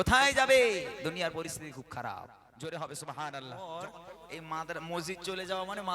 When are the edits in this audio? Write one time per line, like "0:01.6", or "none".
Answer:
0:03.6